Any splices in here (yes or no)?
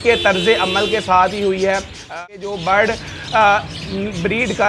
yes